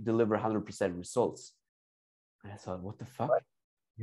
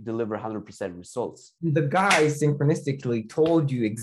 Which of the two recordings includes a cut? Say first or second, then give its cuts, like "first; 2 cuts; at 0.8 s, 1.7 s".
second; 1 cut; at 1.4 s